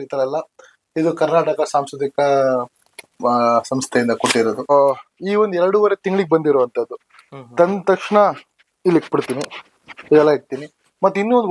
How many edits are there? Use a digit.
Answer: 1